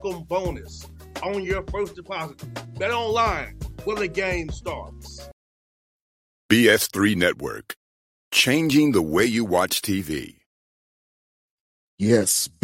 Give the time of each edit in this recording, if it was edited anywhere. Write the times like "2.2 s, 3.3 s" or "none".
5.3 s